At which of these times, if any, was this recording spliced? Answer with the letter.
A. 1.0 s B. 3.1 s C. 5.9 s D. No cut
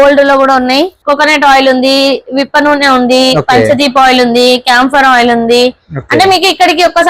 A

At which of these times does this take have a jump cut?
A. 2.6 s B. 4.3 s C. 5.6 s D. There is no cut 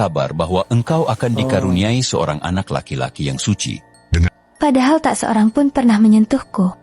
B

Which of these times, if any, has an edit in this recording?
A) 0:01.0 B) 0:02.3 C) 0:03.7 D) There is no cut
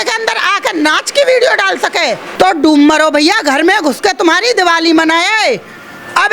B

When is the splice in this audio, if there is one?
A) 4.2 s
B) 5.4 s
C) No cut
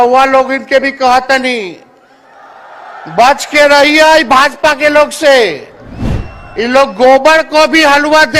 C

